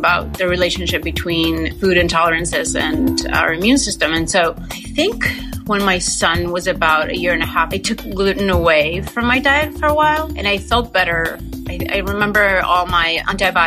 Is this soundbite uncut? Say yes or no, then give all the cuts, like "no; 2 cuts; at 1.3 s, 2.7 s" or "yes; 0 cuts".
yes; 0 cuts